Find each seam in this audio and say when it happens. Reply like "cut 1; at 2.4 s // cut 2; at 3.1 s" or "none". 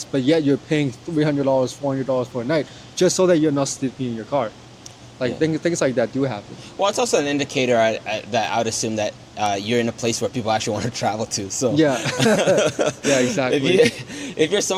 none